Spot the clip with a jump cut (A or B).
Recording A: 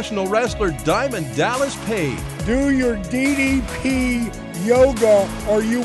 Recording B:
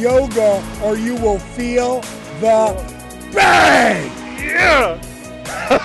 A